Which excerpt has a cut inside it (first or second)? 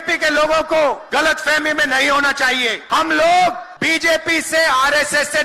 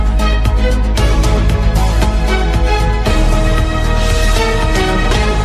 first